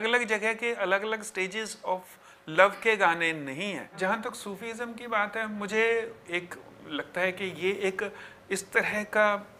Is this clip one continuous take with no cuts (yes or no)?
no